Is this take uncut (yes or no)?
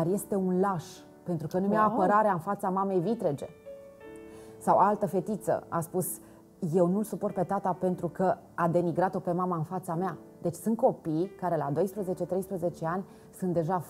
yes